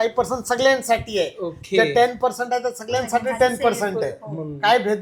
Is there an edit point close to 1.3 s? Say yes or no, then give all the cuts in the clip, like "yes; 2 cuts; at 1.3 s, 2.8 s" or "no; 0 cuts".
no; 0 cuts